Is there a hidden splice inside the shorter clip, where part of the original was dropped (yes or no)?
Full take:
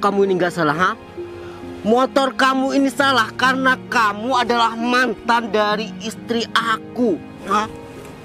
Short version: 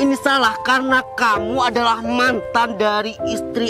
no